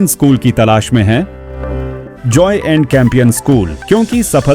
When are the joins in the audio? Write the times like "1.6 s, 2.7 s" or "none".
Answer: 2.1 s